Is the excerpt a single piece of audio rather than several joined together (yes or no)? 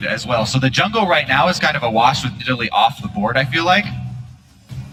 yes